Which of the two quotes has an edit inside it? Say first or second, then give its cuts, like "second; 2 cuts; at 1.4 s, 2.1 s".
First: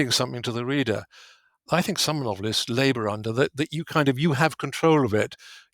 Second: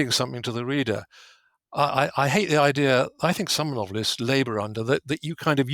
first; 1 cut; at 1.6 s